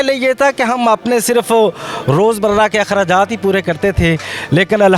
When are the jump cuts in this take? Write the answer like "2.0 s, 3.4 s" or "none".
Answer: none